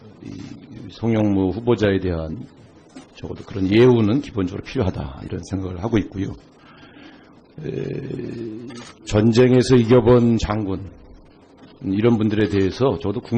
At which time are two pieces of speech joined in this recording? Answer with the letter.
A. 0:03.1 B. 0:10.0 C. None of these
B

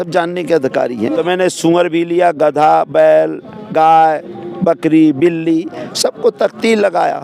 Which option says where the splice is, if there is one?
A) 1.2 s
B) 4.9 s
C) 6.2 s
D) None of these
A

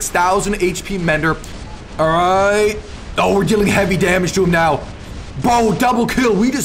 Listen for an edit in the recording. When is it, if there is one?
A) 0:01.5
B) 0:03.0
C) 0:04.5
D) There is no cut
A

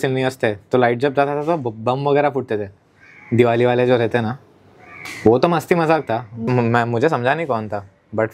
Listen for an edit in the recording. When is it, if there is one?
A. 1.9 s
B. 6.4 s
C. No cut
B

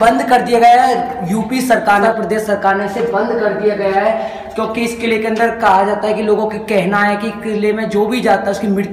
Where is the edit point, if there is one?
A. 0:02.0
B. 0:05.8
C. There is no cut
A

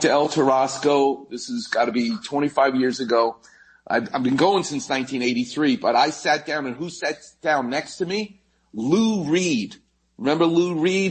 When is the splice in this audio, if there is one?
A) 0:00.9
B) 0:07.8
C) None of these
C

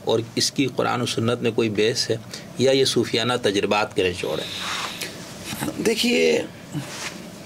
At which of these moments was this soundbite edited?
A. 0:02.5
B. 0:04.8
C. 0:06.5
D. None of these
D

